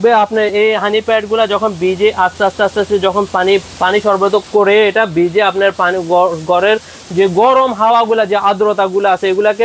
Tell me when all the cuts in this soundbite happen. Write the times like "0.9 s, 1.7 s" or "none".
none